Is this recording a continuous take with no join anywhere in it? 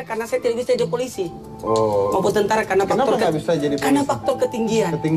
yes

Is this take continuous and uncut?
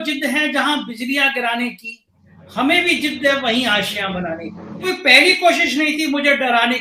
no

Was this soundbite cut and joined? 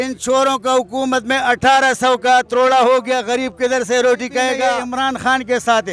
yes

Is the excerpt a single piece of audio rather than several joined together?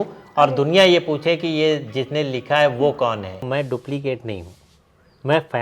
no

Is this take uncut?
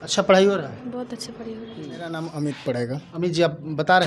no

